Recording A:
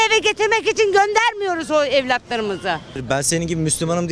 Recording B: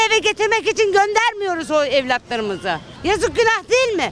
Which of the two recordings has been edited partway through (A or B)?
A